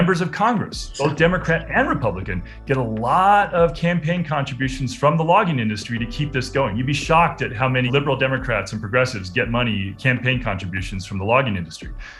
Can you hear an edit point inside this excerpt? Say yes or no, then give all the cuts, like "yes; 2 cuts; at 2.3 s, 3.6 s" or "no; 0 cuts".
yes; 1 cut; at 7.9 s